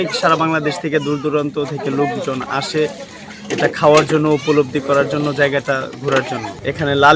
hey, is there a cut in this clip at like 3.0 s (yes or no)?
no